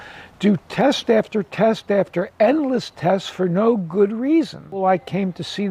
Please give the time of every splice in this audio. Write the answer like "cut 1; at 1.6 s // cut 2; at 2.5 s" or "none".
cut 1; at 4.8 s